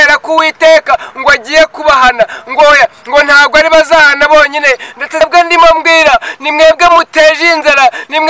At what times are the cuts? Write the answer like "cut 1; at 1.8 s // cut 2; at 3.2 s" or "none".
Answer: cut 1; at 5.2 s